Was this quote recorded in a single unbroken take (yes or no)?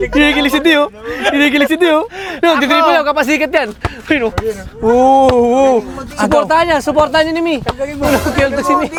yes